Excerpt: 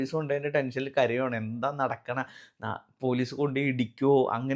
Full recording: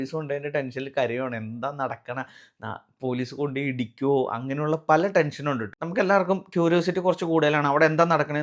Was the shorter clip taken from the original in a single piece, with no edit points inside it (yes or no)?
yes